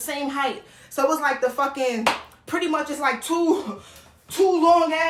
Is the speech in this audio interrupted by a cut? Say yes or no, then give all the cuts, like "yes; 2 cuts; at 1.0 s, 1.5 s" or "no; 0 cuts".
no; 0 cuts